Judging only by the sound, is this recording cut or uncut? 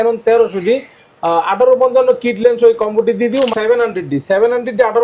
cut